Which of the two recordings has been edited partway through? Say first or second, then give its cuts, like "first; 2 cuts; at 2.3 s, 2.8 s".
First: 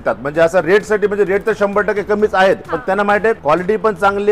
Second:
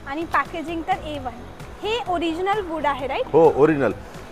first; 1 cut; at 3.0 s